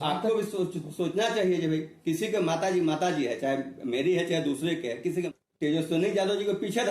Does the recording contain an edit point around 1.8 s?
no; 1 cut; at 5.3 s

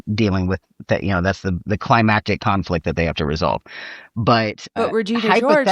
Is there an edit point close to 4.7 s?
yes; 1 cut; at 4.7 s

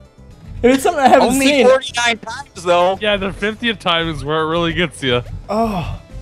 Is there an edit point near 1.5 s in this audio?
yes; 1 cut; at 1.5 s

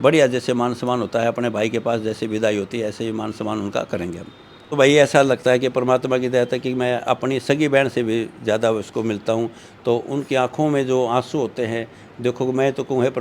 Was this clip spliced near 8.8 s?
no; 1 cut; at 4.7 s

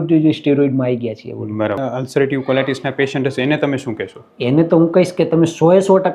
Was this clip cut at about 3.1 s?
no; 1 cut; at 1.8 s

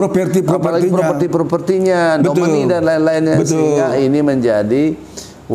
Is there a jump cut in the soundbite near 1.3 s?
no; 0 cuts

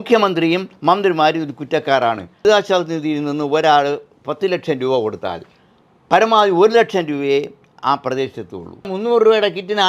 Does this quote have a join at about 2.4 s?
yes; 2 cuts; at 2.4 s, 8.9 s

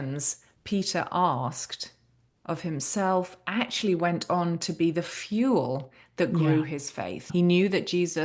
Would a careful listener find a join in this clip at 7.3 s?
yes; 1 cut; at 7.3 s

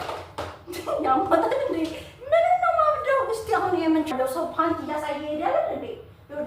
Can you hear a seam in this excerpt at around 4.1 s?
yes; 1 cut; at 4.1 s

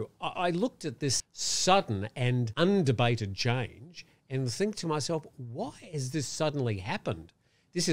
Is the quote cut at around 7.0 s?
no; 2 cuts; at 1.2 s, 2.5 s

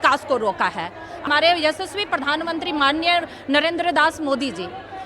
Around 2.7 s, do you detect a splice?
no; 1 cut; at 1.2 s

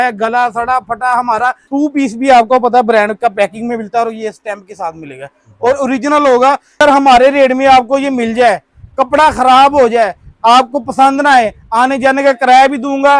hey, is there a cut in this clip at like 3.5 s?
no; 2 cuts; at 1.6 s, 6.8 s

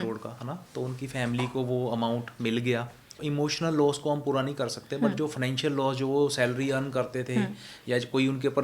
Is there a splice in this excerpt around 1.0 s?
no; 1 cut; at 3.2 s

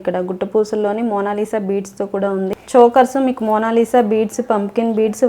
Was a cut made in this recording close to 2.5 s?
yes; 1 cut; at 2.5 s

